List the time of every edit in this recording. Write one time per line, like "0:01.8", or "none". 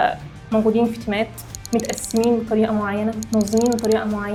none

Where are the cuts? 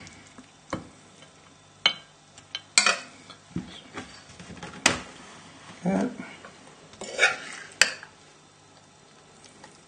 0:03.4

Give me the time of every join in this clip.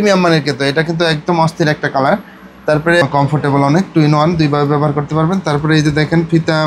0:03.0

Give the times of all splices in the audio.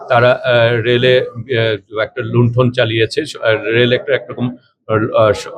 none

